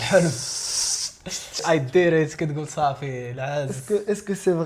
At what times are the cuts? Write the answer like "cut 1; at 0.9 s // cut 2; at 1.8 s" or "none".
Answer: cut 1; at 1.6 s